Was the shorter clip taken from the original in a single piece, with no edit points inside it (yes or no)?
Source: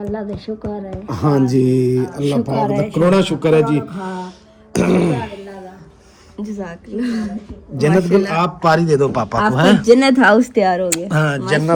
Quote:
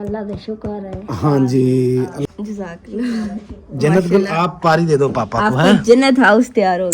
no